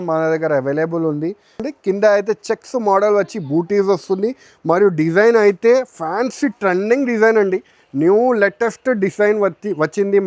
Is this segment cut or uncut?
cut